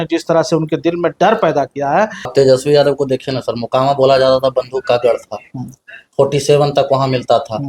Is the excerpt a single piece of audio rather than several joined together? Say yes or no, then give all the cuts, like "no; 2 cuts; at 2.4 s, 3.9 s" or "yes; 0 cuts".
no; 1 cut; at 2.3 s